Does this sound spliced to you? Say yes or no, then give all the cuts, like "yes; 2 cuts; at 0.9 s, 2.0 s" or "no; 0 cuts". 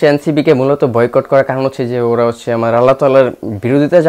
no; 0 cuts